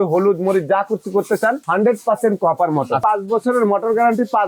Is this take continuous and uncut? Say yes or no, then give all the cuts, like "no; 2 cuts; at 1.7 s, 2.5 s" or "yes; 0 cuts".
no; 2 cuts; at 1.6 s, 3.0 s